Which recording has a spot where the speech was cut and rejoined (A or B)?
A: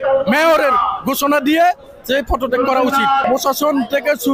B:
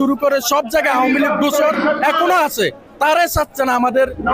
A